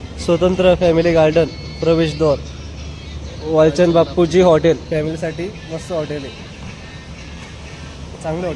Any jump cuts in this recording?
no; 0 cuts

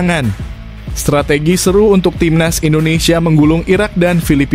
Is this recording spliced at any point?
no; 0 cuts

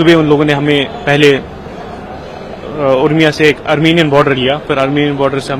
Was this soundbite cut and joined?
no; 0 cuts

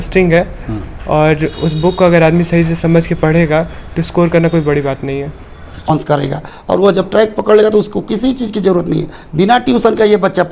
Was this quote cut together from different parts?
yes; 1 cut; at 5.9 s

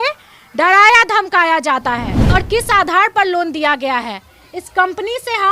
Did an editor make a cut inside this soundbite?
yes; 1 cut; at 2.3 s

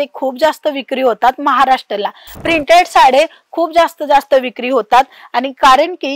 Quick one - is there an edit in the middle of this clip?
no; 0 cuts

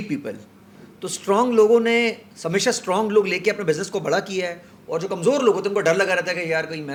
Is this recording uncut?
yes; 0 cuts

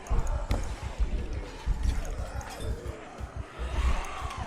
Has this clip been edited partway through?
no; 0 cuts

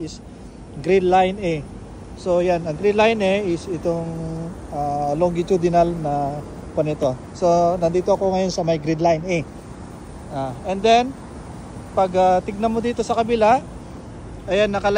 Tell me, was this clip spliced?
no; 0 cuts

